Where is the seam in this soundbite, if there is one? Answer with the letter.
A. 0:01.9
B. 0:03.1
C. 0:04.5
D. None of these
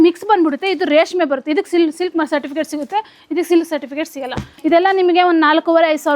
C